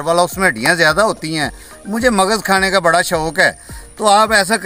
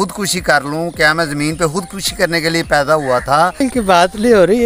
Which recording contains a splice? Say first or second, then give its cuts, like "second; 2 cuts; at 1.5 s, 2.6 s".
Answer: second; 1 cut; at 3.6 s